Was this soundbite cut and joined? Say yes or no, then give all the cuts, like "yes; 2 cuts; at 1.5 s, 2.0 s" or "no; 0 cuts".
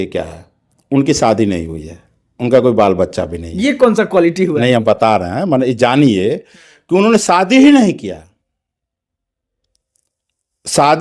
no; 0 cuts